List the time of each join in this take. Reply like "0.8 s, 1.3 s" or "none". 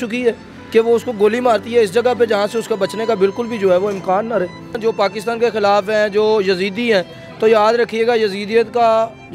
4.8 s